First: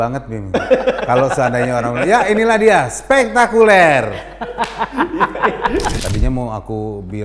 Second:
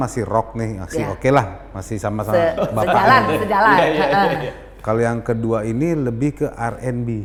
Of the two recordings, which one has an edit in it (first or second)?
first